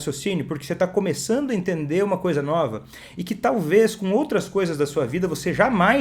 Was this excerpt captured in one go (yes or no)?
yes